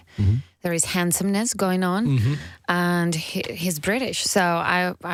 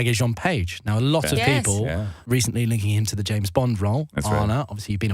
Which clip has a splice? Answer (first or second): second